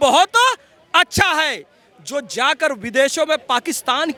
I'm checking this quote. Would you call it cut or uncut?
uncut